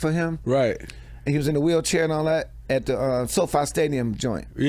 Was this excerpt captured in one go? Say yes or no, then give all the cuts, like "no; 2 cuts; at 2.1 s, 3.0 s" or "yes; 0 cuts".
yes; 0 cuts